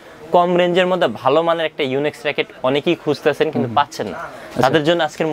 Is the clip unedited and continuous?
yes; 0 cuts

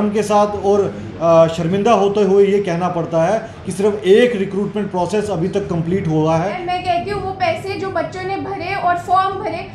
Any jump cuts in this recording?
yes; 1 cut; at 6.6 s

